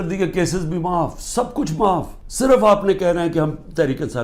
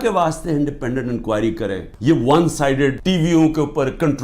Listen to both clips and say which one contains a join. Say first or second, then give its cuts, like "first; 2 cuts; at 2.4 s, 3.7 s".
second; 2 cuts; at 1.9 s, 3.0 s